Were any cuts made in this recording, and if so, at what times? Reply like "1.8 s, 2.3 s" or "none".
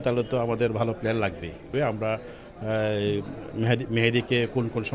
1.7 s